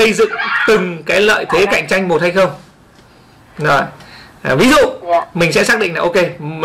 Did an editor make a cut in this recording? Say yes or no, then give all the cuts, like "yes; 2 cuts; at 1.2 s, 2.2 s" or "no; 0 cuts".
no; 0 cuts